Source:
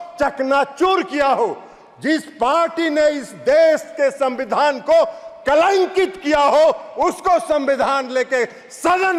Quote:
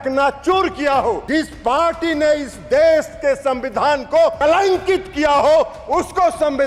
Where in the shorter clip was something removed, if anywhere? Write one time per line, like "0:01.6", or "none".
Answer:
0:01.2
0:04.4